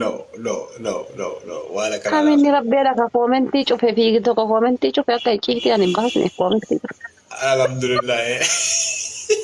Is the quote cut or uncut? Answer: uncut